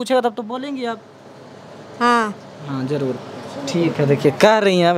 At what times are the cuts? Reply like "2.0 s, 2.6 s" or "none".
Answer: none